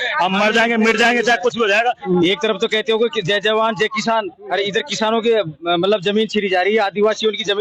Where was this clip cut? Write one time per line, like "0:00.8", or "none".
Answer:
0:02.0